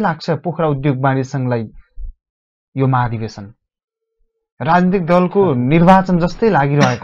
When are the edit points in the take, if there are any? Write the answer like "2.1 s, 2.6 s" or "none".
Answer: none